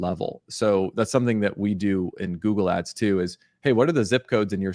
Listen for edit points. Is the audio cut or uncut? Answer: uncut